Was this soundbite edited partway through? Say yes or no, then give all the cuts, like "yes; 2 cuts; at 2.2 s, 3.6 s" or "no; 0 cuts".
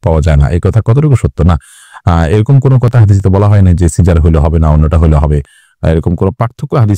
no; 0 cuts